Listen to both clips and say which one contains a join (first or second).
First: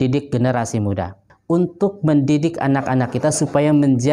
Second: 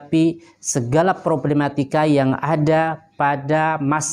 first